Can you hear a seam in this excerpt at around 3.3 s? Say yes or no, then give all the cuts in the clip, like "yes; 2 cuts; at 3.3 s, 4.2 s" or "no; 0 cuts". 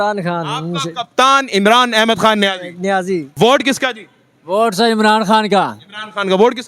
yes; 1 cut; at 3.3 s